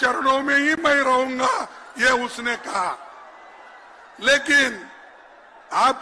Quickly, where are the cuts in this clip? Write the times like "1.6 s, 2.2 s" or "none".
none